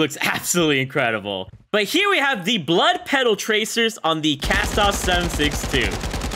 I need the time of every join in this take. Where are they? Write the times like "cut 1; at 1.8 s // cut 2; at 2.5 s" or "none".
cut 1; at 1.6 s